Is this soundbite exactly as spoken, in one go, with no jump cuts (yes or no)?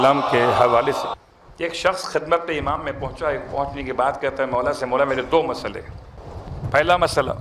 no